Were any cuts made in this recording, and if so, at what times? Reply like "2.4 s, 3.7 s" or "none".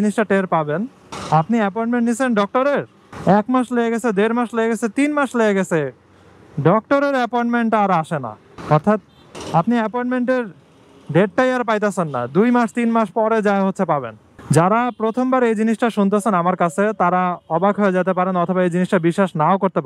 none